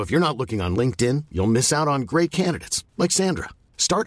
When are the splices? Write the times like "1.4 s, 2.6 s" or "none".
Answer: none